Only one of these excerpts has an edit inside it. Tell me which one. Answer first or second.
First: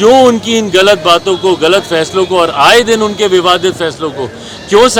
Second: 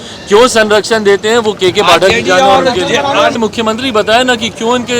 second